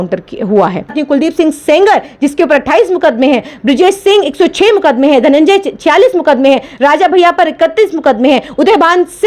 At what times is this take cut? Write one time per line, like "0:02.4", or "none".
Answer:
0:00.9